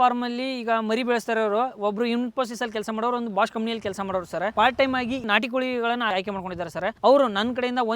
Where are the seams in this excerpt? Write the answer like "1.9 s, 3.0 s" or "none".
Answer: 4.5 s